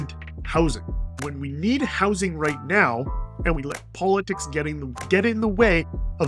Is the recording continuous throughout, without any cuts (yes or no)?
no